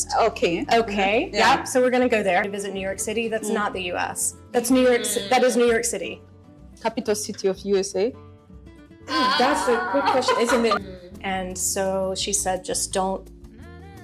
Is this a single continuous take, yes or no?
no